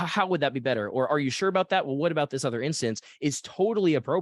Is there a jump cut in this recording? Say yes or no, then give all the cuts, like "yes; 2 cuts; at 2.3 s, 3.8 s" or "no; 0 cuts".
no; 0 cuts